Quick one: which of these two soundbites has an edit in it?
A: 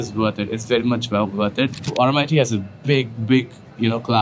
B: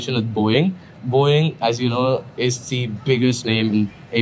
A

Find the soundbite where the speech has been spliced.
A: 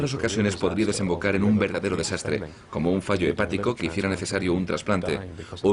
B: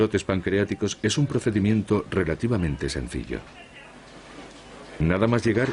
B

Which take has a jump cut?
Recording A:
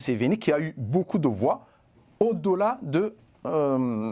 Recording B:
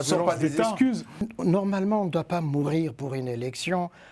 B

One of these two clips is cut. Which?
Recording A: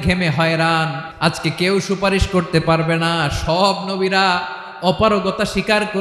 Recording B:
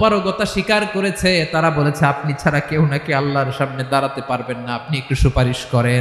A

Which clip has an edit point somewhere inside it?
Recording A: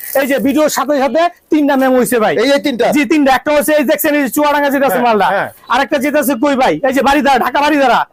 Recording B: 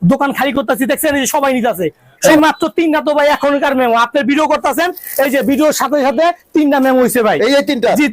B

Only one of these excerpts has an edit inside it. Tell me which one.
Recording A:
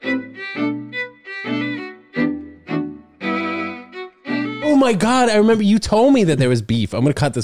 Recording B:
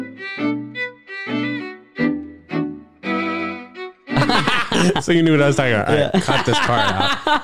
A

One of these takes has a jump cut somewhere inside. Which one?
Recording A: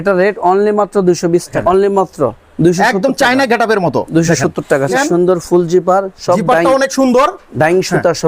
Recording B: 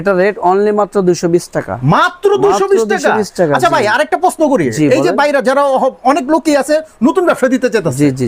A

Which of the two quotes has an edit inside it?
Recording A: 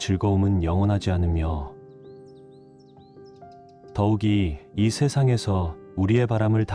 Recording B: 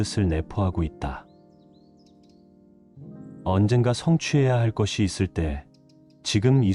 A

